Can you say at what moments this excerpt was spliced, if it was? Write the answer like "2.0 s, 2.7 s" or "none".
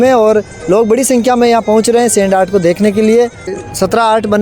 3.5 s